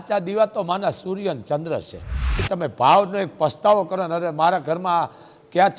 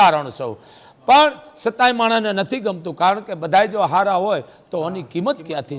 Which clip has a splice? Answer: first; 1 cut; at 2.4 s

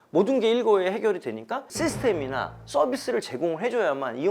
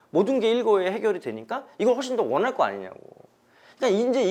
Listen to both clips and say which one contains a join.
first; 1 cut; at 1.7 s

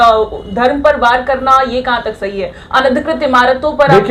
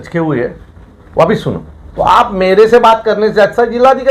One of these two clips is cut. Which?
second; 1 cut; at 1.8 s

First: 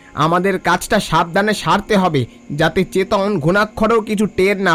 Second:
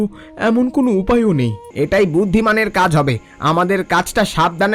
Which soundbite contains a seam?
second; 1 cut; at 1.6 s

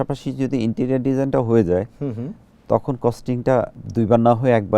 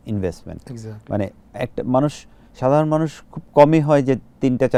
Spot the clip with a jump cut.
first; 1 cut; at 3.8 s

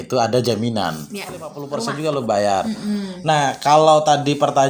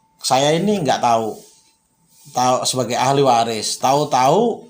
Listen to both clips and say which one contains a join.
first; 1 cut; at 1.6 s

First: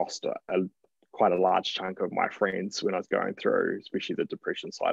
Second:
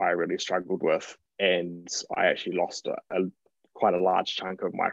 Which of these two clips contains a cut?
second; 1 cut; at 1.2 s

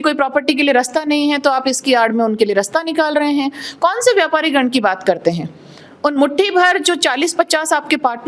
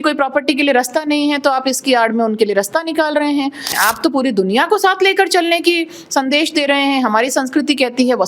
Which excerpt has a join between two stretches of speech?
second; 1 cut; at 3.7 s

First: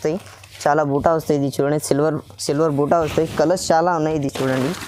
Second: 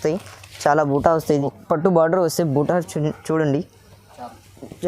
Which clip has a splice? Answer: second; 1 cut; at 1.5 s

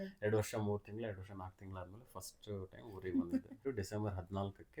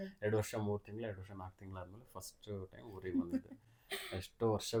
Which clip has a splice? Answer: first; 1 cut; at 3.6 s

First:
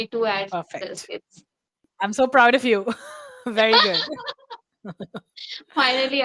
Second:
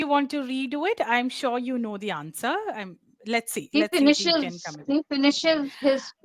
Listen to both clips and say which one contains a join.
first; 1 cut; at 1.8 s

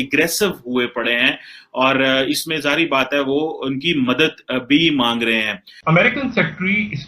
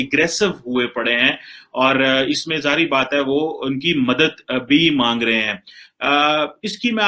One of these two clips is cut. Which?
first; 1 cut; at 5.7 s

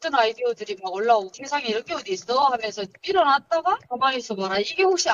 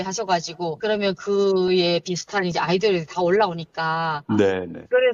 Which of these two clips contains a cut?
first; 1 cut; at 1.4 s

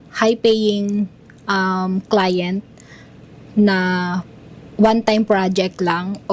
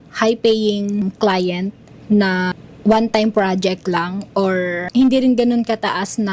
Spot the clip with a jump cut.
second; 4 cuts; at 1.0 s, 1.9 s, 2.6 s, 4.9 s

